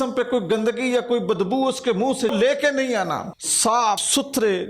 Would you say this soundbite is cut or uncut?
cut